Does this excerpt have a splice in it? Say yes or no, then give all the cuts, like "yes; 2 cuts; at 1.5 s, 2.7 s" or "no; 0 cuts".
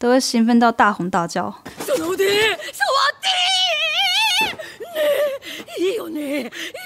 no; 0 cuts